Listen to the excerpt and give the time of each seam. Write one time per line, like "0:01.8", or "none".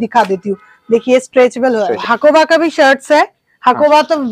0:02.0